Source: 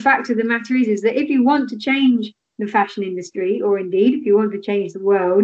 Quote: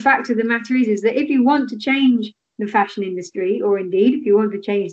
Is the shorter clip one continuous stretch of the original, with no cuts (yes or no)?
yes